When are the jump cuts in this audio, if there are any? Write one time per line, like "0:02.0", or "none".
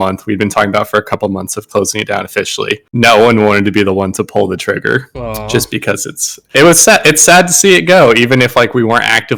none